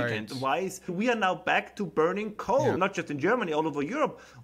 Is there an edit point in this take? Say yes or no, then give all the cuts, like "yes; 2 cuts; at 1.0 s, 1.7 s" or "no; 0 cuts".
yes; 2 cuts; at 0.9 s, 2.8 s